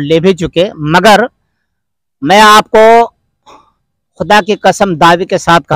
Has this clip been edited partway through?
no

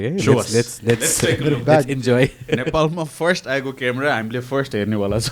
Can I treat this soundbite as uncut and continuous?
yes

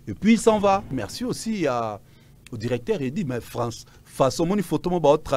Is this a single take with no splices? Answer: no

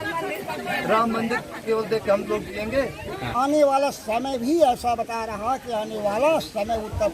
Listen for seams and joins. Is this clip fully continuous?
no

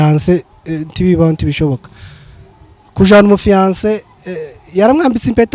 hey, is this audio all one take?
yes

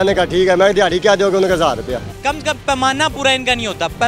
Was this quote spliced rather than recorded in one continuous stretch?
yes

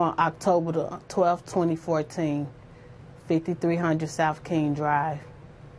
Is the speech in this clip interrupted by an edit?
yes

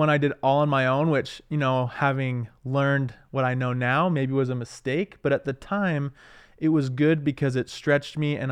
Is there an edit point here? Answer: no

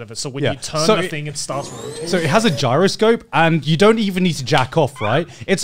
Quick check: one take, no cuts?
yes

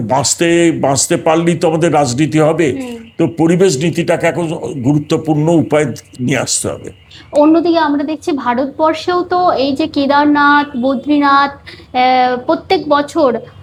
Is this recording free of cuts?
yes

